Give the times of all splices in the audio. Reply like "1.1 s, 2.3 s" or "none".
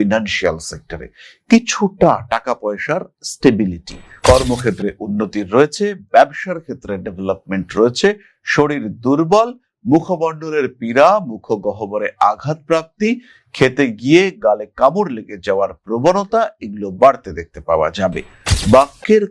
4.1 s